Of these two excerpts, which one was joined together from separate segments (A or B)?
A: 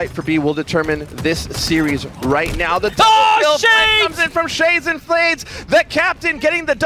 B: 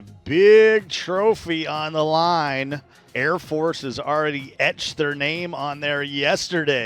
B